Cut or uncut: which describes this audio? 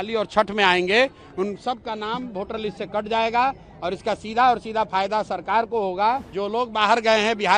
cut